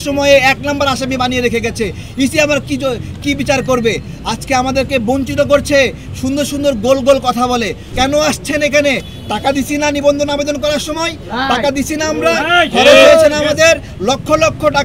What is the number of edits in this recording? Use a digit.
1